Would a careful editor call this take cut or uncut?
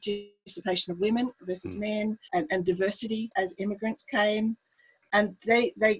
cut